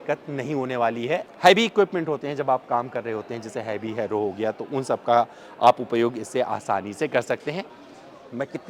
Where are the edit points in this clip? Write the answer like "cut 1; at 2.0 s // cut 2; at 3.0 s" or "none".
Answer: cut 1; at 1.2 s // cut 2; at 7.7 s

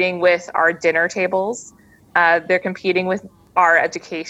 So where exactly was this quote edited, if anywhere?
cut 1; at 3.3 s

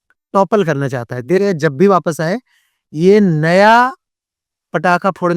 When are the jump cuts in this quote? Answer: cut 1; at 1.4 s

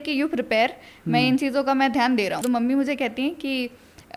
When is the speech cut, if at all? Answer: cut 1; at 2.4 s

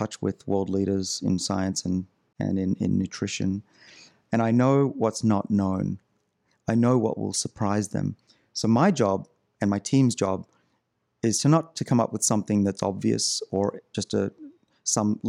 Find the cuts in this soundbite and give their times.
cut 1; at 2.2 s

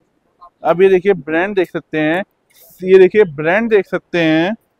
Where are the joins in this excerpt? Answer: none

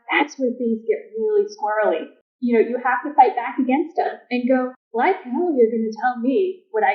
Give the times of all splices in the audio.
cut 1; at 2.1 s // cut 2; at 4.8 s

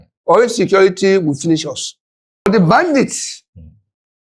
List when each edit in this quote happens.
cut 1; at 2.5 s

